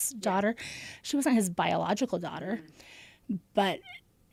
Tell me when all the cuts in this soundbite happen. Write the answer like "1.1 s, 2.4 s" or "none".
none